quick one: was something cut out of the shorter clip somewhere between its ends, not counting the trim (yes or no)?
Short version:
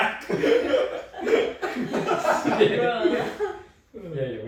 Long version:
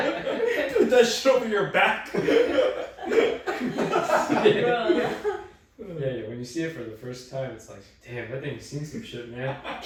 no